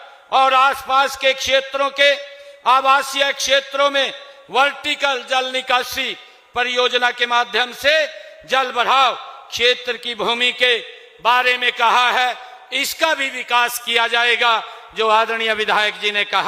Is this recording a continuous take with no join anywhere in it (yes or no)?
yes